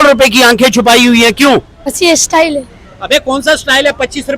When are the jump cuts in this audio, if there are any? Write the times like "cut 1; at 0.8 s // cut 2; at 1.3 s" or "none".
cut 1; at 1.9 s